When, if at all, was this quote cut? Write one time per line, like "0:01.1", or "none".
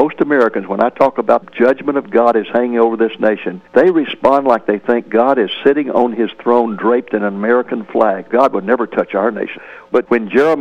0:03.5
0:08.3
0:09.5